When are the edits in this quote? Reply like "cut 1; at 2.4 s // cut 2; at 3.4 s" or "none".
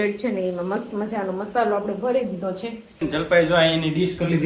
cut 1; at 3.0 s